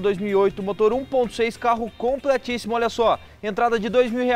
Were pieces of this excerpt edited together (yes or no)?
no